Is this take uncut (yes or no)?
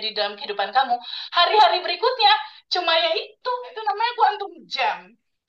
no